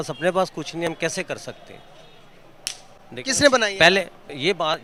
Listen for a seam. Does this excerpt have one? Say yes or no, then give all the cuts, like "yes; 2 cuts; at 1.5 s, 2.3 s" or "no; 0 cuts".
no; 0 cuts